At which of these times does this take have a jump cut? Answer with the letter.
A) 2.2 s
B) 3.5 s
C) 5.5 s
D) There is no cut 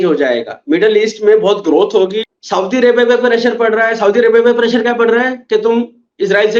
A